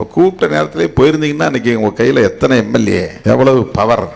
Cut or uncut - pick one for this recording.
cut